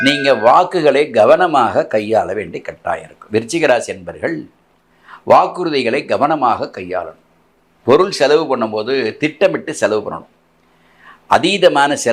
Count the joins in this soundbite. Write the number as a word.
zero